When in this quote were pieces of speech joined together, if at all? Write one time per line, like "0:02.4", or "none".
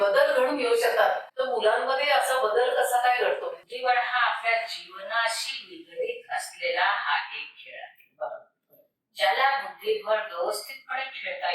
0:01.3
0:03.6